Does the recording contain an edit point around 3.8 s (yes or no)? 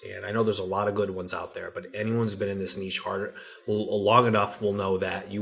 no